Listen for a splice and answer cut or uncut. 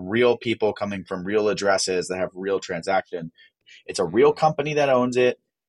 cut